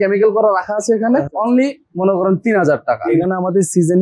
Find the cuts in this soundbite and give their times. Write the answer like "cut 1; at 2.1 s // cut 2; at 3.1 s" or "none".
cut 1; at 1.4 s // cut 2; at 3.2 s